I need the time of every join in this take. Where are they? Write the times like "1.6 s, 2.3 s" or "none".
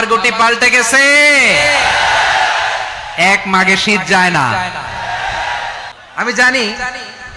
6.0 s